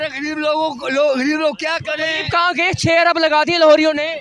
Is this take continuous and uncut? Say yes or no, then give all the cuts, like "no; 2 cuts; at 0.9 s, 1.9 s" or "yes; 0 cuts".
yes; 0 cuts